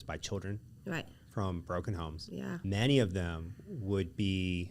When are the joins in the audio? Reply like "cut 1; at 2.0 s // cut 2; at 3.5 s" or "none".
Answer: cut 1; at 2.6 s